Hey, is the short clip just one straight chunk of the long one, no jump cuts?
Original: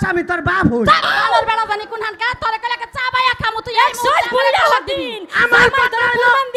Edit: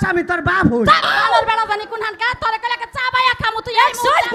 yes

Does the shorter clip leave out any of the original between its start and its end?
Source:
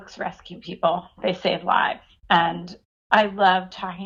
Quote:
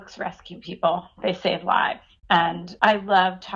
yes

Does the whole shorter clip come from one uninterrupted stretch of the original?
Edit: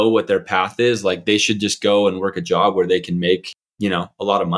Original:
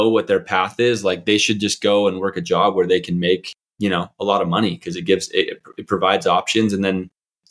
yes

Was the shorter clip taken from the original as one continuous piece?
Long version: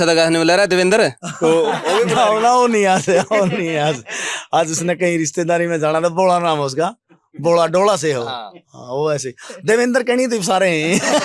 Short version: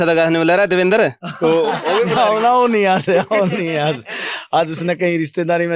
yes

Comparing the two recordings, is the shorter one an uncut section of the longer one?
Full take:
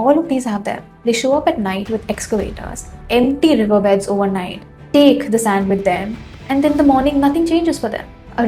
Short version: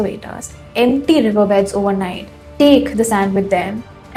yes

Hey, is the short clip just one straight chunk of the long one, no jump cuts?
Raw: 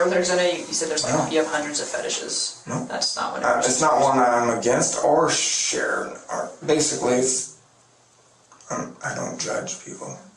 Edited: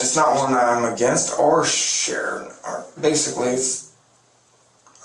yes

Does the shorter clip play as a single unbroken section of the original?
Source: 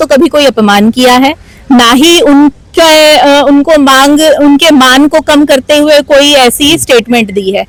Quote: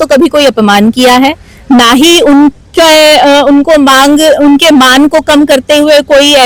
yes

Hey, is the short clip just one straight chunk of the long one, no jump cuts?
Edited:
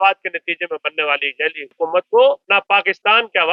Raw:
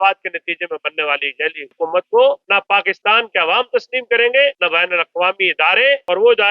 yes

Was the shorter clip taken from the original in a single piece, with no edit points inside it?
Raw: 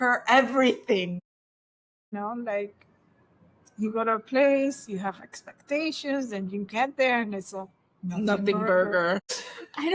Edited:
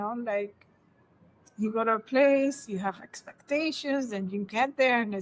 yes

